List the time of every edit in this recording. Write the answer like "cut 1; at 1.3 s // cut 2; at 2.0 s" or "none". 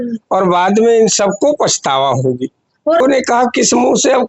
cut 1; at 3.0 s

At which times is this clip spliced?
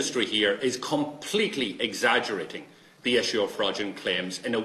none

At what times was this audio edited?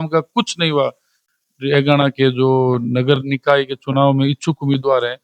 cut 1; at 1.1 s

